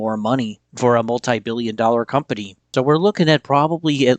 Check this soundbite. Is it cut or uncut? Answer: cut